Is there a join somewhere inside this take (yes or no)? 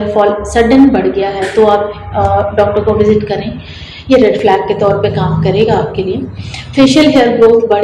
no